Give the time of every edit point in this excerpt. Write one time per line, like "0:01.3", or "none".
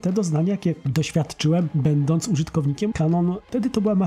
0:02.9